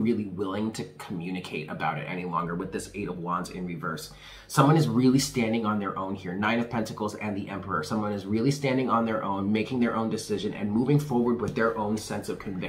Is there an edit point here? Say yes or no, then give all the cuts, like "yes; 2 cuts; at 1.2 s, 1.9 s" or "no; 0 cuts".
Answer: no; 0 cuts